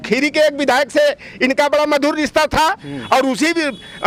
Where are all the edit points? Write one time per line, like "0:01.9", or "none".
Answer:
none